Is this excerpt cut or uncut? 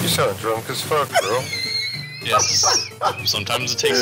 uncut